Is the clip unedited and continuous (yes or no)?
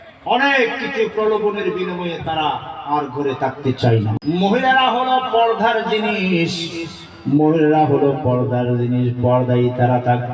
no